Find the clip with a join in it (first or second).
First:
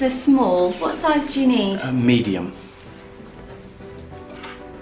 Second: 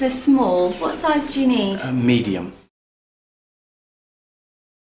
first